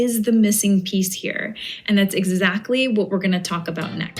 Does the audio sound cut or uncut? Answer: uncut